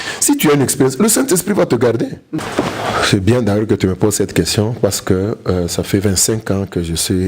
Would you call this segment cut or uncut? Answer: cut